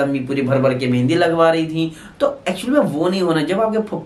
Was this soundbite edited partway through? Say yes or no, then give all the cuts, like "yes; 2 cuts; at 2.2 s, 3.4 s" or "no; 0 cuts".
no; 0 cuts